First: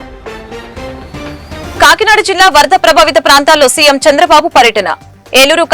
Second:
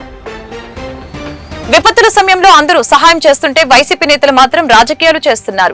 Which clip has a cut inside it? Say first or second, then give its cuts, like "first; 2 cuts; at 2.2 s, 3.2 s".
first; 1 cut; at 1.6 s